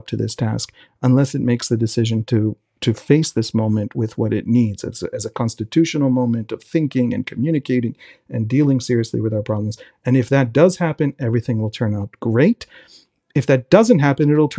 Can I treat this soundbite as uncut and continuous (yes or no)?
yes